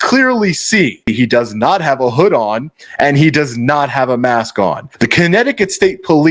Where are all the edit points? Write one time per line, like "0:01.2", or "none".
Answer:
0:01.1
0:04.9